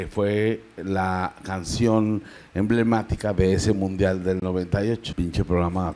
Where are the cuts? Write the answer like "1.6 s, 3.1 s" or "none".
5.1 s